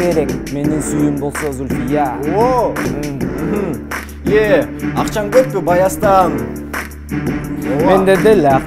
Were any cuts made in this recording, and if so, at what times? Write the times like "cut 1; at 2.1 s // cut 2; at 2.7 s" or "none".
cut 1; at 2.9 s